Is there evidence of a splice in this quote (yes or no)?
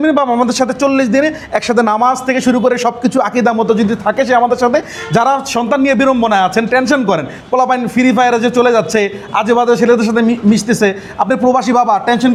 no